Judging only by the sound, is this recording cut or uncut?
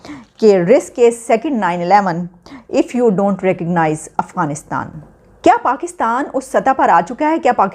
cut